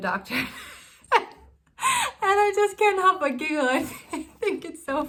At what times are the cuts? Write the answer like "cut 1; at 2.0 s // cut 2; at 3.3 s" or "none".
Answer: none